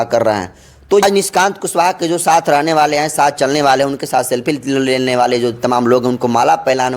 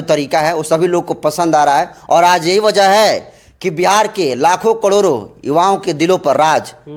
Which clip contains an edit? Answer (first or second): first